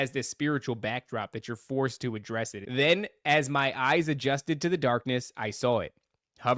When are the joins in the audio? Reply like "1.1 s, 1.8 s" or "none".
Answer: 2.6 s